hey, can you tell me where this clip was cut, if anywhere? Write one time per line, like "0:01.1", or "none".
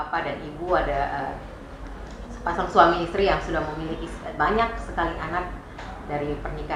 none